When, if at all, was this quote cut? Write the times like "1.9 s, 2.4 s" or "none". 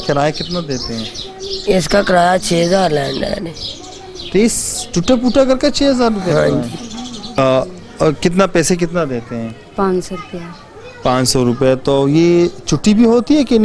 7.2 s